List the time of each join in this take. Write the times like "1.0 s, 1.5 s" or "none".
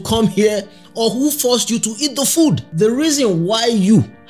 2.7 s